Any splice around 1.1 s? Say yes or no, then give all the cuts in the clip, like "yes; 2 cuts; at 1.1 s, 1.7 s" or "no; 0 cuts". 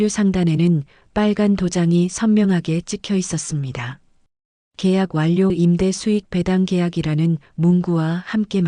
no; 1 cut; at 5.5 s